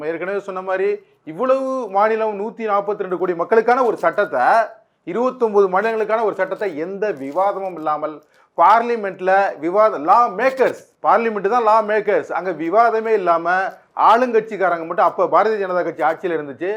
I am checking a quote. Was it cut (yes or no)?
yes